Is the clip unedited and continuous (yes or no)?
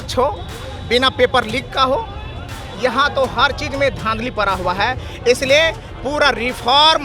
yes